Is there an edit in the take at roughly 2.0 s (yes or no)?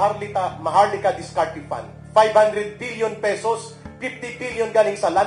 yes